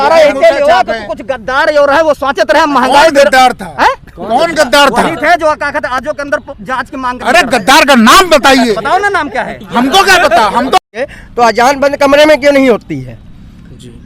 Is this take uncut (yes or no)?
no